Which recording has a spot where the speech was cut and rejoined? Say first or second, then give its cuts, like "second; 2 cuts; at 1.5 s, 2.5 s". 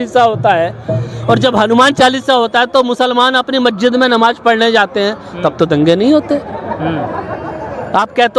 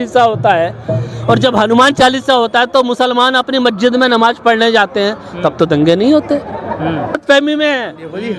second; 1 cut; at 7.2 s